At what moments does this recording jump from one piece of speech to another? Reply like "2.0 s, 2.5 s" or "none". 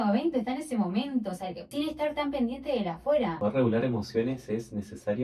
1.6 s, 3.4 s

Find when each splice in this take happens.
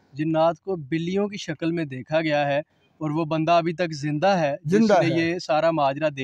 none

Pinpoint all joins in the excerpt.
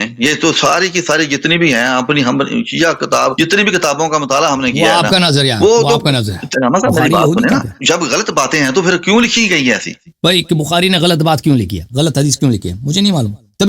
3.3 s, 6.5 s, 7.7 s, 10.1 s, 11.8 s

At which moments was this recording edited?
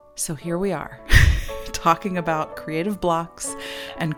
none

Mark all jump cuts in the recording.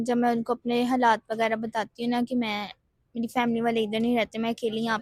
none

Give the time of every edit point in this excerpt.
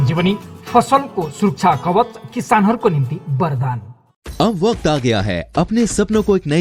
none

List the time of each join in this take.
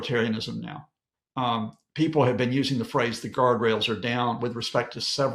none

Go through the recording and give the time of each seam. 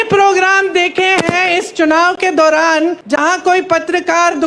3.0 s

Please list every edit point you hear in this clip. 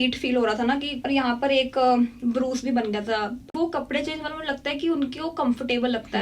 0.9 s, 3.5 s

